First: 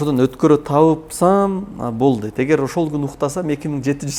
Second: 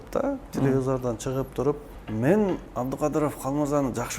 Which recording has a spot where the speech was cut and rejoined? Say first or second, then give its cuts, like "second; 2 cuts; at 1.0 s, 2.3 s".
second; 2 cuts; at 2.0 s, 2.7 s